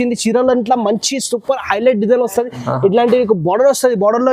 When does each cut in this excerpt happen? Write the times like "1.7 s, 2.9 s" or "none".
none